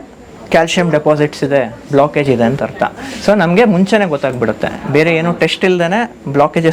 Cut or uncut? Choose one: uncut